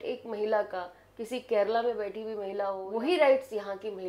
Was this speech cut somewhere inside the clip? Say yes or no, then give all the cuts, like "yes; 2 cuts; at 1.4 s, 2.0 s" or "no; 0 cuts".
yes; 1 cut; at 2.8 s